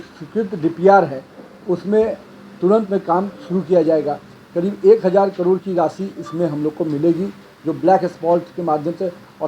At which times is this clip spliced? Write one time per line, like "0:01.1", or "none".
none